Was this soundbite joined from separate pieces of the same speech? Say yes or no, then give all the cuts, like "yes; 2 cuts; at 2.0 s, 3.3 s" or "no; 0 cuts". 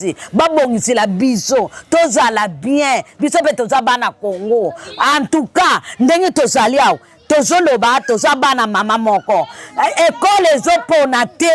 no; 0 cuts